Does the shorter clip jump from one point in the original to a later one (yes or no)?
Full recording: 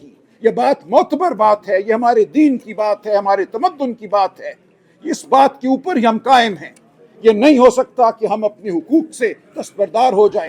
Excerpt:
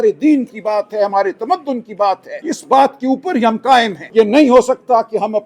yes